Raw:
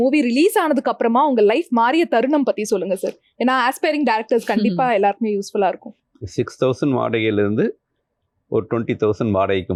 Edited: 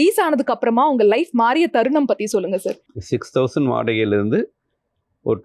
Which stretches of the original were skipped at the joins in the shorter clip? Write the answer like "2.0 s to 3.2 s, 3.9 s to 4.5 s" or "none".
3.2 s to 6.1 s